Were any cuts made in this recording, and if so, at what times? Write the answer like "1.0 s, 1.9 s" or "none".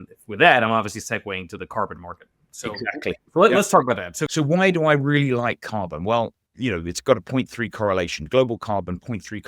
4.2 s, 6.4 s